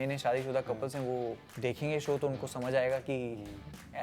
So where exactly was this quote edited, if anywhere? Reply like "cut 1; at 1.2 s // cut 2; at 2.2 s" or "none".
cut 1; at 1.5 s